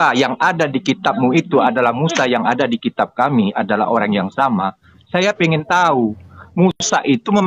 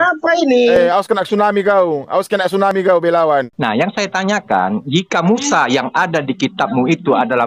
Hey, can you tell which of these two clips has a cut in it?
second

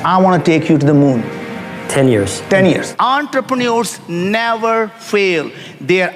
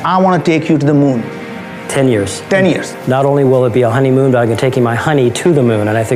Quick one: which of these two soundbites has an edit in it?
first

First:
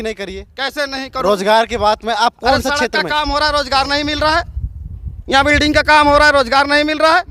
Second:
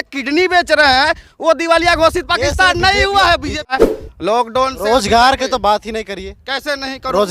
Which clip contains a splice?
second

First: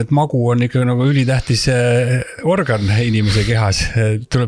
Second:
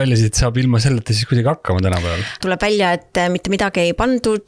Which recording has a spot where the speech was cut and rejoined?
second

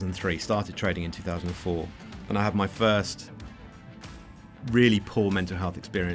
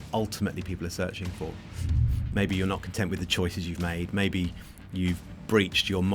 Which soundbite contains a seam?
second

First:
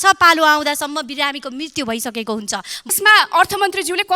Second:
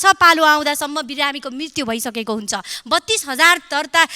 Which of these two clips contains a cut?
first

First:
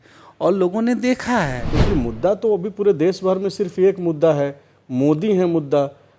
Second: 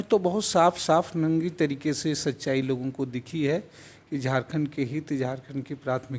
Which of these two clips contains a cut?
first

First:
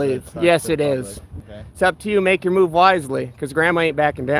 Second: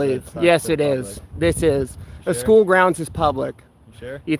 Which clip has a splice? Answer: first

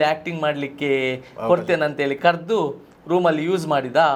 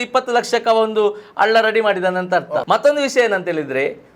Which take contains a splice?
second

